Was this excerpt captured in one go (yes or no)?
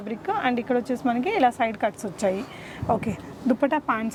yes